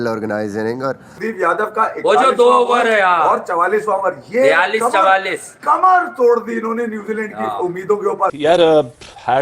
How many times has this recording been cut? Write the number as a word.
two